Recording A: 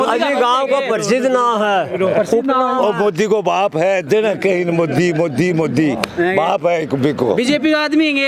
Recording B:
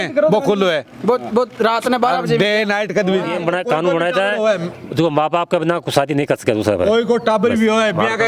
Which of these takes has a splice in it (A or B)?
B